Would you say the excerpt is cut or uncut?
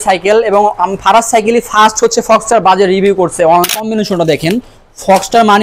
cut